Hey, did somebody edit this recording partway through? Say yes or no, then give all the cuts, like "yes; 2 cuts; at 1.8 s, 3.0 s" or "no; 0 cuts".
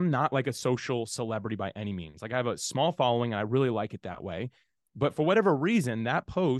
no; 0 cuts